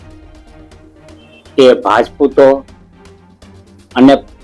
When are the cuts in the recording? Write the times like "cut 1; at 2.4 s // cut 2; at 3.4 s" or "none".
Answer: cut 1; at 0.9 s